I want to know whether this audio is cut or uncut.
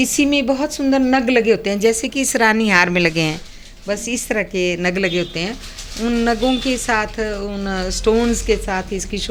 uncut